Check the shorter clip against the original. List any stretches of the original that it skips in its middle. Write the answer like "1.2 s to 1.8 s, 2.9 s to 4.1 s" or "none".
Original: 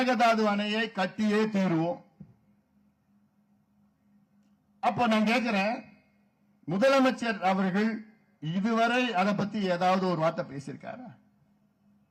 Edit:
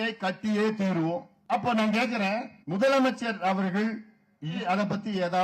2.1 s to 4.7 s, 5.9 s to 6.6 s, 8.6 s to 9.1 s